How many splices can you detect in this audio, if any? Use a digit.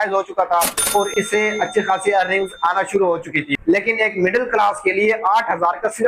1